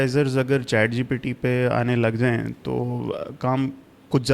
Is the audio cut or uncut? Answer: uncut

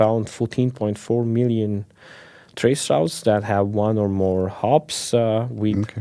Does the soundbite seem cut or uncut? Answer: uncut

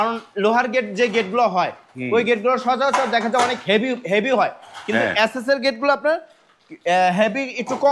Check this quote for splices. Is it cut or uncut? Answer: uncut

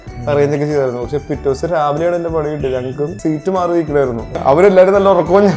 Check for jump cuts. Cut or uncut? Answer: cut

